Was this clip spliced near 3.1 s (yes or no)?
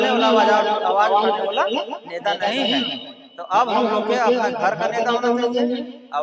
no